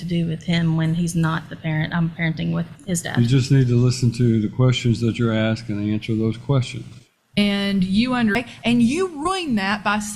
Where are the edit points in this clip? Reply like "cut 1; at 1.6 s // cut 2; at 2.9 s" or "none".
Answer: cut 1; at 8.3 s